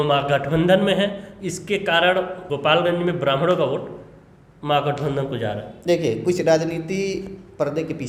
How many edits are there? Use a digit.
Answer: 0